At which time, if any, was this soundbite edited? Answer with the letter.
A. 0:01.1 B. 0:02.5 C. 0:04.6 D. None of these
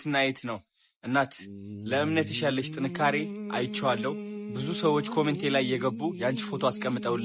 D